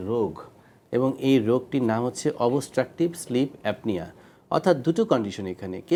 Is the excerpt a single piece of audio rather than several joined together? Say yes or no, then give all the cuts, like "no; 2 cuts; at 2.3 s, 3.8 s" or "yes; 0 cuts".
yes; 0 cuts